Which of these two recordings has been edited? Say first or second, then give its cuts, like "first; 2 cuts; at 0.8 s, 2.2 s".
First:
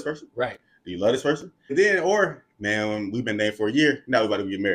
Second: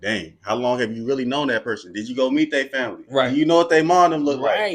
first; 1 cut; at 1.7 s